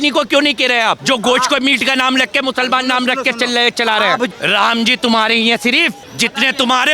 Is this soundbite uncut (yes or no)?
no